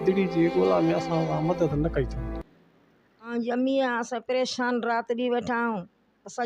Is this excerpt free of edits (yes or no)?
no